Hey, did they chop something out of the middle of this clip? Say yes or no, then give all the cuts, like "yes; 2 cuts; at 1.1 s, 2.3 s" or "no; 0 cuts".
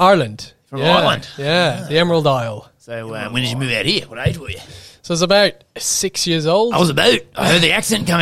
yes; 1 cut; at 3.1 s